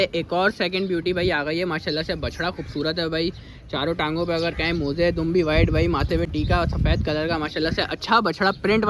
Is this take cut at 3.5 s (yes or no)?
no